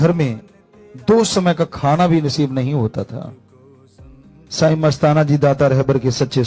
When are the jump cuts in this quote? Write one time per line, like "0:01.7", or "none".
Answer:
none